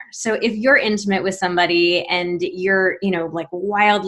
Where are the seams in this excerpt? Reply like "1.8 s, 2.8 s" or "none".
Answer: none